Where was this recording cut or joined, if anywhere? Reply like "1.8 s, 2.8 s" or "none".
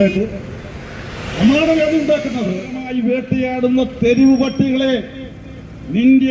2.8 s